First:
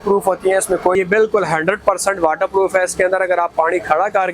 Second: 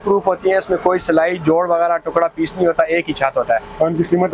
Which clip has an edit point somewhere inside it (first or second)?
first